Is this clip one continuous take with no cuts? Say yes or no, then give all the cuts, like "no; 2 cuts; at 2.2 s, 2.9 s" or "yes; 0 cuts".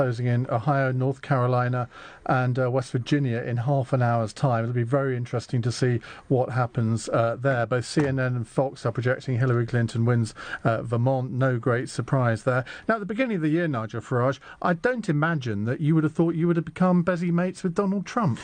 yes; 0 cuts